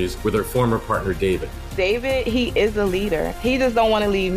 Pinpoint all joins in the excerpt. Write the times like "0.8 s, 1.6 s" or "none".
none